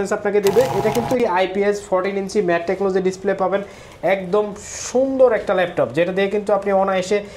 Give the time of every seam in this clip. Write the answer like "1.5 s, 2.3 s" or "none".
1.2 s